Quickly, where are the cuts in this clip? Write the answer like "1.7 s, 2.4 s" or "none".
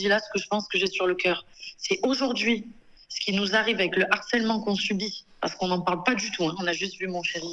none